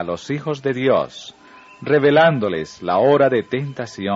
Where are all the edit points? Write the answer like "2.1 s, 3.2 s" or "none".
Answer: none